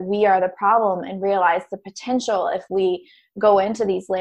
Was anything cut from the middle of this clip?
no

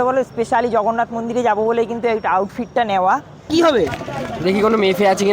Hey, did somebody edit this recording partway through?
yes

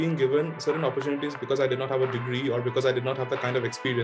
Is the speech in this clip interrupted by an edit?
no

